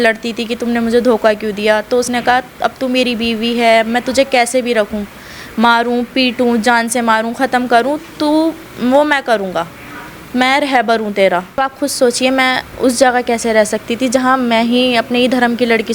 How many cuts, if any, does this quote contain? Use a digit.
1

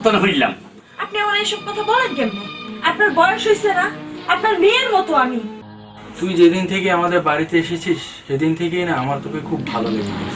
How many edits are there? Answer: 1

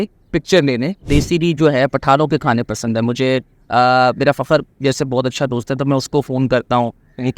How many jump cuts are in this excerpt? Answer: 1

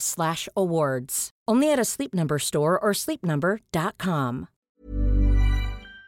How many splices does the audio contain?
1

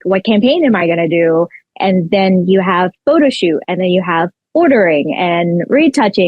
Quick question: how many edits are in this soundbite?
0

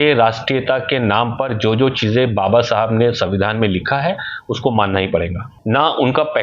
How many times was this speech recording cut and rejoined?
1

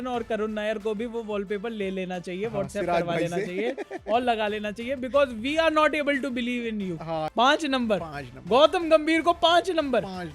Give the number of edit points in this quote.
1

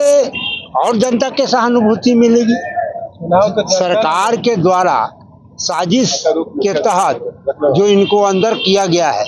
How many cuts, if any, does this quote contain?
0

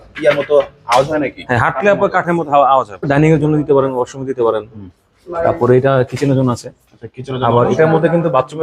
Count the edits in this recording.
1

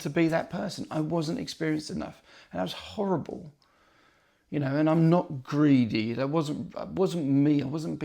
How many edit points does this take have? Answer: 0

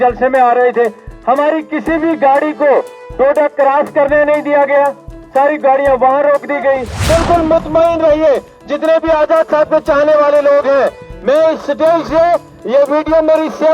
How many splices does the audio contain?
1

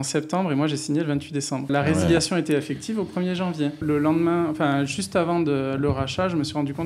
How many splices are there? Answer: 2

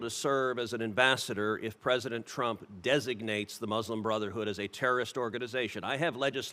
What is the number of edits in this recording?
0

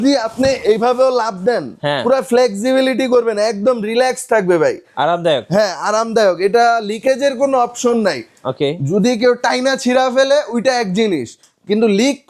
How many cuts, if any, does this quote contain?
0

